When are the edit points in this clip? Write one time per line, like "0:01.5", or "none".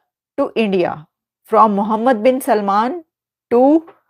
none